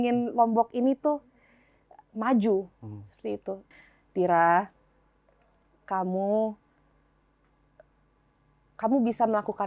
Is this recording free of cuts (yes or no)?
no